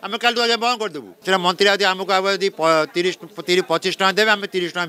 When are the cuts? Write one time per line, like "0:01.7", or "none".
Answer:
0:01.1

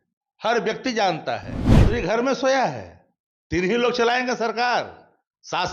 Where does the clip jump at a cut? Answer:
0:01.8

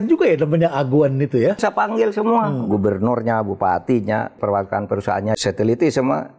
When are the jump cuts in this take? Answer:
0:01.6
0:04.3
0:05.4

